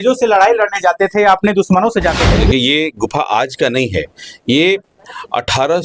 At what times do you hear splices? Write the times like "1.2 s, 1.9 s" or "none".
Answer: 2.2 s